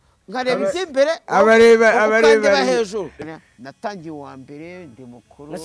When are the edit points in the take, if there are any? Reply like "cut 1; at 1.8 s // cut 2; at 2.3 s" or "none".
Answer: cut 1; at 3.2 s